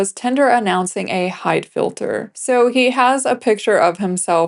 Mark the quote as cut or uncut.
cut